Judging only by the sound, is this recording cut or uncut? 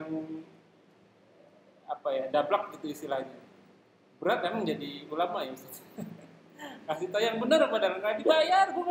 uncut